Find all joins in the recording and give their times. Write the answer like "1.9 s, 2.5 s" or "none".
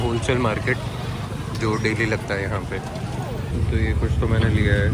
3.5 s